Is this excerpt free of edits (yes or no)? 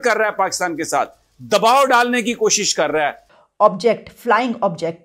no